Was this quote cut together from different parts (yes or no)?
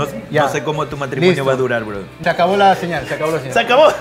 yes